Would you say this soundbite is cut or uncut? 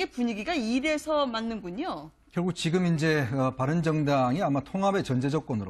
uncut